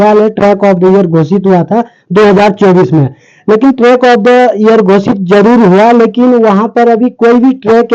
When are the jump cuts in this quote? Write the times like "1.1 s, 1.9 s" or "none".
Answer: none